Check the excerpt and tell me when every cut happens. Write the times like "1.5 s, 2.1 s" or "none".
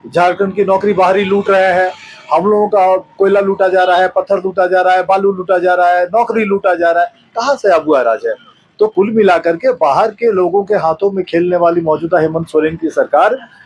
none